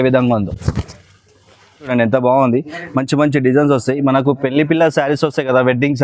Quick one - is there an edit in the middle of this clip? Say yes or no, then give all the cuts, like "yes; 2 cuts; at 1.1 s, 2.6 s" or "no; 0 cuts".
yes; 1 cut; at 1.9 s